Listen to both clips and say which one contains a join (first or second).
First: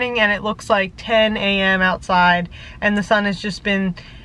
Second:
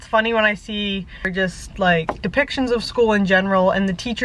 second